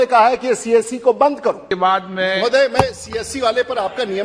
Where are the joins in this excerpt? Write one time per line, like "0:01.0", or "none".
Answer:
0:01.7